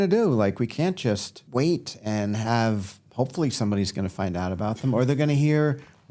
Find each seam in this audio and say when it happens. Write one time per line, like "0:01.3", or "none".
0:01.3